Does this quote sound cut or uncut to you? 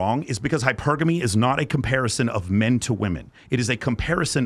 uncut